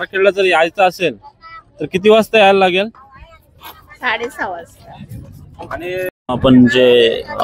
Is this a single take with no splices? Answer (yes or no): no